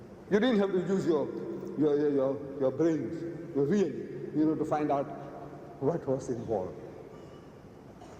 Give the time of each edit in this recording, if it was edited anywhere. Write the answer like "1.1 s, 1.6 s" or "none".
7.0 s